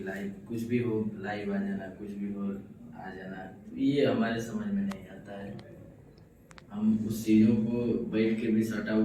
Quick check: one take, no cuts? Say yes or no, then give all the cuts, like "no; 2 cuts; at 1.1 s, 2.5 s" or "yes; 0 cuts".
yes; 0 cuts